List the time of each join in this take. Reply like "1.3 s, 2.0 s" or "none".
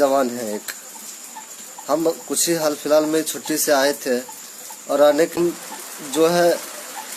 5.4 s